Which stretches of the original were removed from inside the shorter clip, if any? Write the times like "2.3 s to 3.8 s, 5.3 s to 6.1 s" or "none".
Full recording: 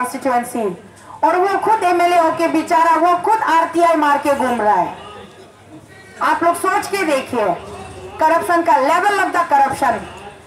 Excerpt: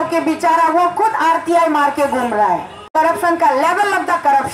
5.0 s to 8.0 s